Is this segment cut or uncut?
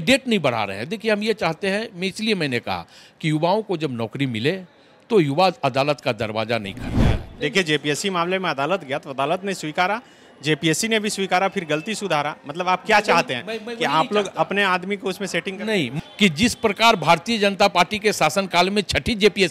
cut